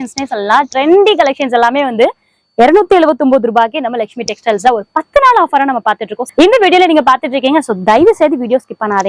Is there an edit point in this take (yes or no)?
yes